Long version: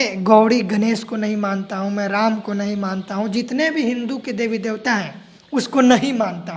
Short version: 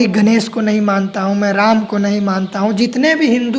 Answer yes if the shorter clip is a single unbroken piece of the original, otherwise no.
yes